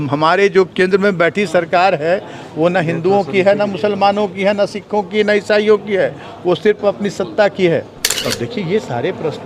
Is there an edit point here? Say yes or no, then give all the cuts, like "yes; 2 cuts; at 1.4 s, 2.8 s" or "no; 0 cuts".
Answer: yes; 1 cut; at 8.1 s